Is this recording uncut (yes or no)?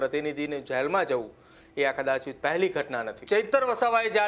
no